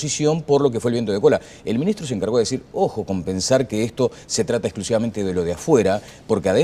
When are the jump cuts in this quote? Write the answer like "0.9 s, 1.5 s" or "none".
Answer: none